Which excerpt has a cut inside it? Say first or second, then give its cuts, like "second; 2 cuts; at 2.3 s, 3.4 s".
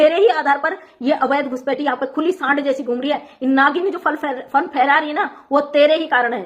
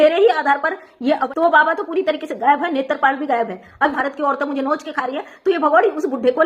second; 2 cuts; at 1.2 s, 3.9 s